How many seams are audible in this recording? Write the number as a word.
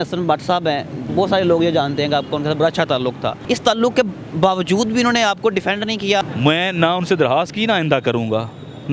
three